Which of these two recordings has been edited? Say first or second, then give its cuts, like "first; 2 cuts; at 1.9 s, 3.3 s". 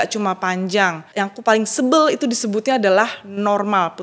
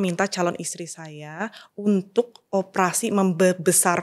first; 1 cut; at 1.0 s